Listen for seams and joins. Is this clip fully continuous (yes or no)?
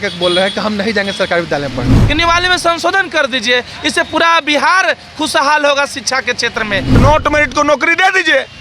no